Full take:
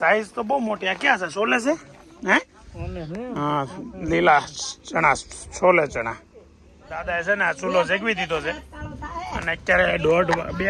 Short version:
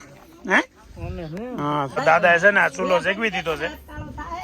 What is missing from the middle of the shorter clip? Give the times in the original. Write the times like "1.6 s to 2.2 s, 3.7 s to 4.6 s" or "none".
3.7 s to 6.8 s